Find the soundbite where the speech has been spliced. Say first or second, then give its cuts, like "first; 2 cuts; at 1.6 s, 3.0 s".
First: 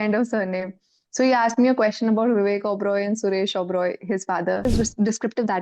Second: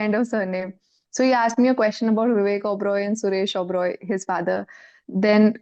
first; 1 cut; at 4.6 s